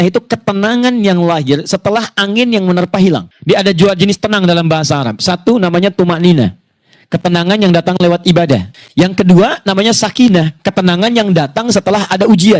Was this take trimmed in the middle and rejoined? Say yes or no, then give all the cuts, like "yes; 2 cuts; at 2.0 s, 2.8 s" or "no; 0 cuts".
no; 0 cuts